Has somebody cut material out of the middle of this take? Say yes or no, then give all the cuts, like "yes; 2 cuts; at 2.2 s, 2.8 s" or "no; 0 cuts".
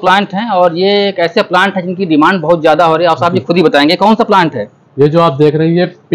no; 0 cuts